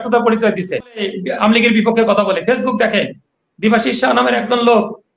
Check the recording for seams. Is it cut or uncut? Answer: cut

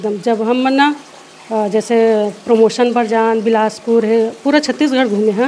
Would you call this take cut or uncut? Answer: uncut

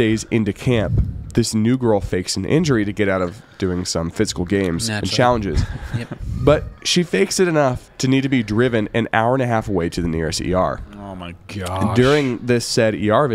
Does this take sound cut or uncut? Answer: uncut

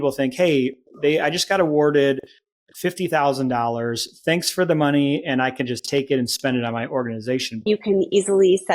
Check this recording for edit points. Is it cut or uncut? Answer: cut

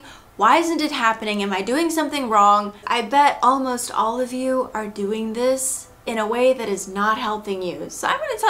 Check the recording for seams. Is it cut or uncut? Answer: cut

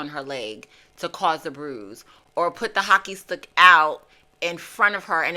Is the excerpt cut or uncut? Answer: uncut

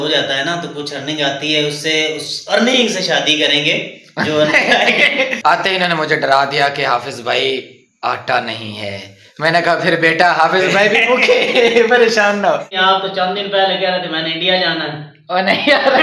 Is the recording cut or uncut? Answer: cut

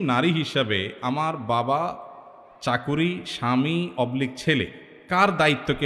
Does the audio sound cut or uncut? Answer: uncut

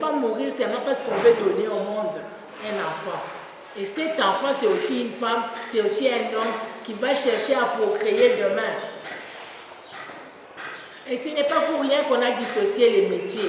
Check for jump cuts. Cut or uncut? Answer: cut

